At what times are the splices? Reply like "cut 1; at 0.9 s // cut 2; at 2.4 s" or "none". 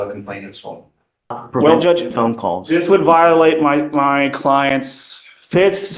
cut 1; at 1.4 s